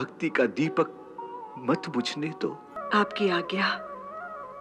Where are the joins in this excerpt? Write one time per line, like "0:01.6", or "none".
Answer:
0:02.7